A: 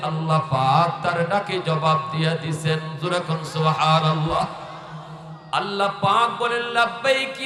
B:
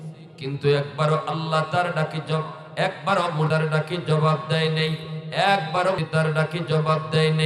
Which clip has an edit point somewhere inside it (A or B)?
B